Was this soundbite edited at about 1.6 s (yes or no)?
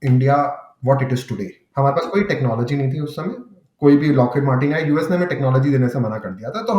yes